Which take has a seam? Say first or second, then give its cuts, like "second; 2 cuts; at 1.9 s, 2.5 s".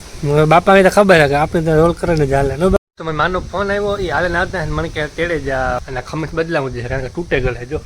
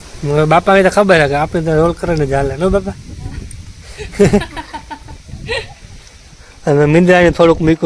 first; 2 cuts; at 2.8 s, 5.8 s